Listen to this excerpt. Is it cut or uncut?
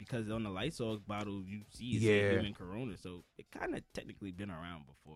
uncut